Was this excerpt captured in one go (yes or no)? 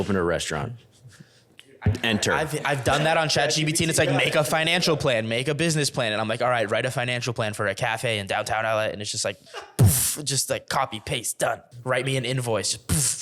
no